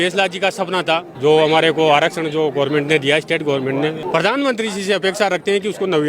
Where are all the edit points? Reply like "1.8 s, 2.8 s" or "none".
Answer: 1.1 s, 4.0 s

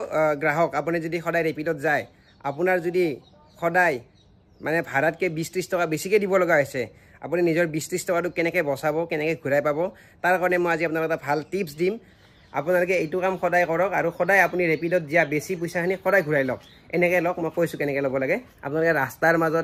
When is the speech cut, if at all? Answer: 12.1 s, 18.5 s

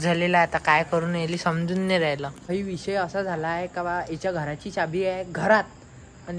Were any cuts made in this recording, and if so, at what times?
2.5 s

